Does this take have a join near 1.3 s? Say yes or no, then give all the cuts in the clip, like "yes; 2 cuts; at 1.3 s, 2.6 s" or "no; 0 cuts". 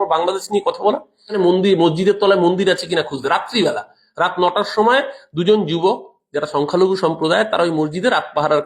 yes; 1 cut; at 1.3 s